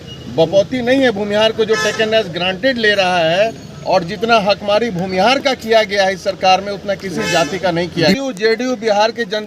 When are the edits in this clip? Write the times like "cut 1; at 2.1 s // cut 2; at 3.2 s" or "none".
cut 1; at 8.2 s